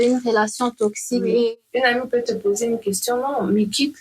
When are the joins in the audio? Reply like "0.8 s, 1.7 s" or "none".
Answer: 1.3 s